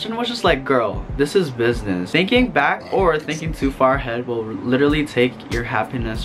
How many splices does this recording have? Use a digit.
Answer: 1